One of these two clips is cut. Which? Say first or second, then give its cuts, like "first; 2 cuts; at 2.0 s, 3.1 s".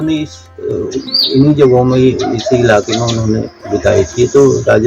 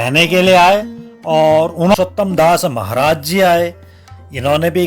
second; 1 cut; at 1.9 s